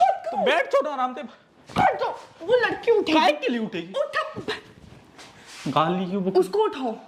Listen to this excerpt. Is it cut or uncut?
uncut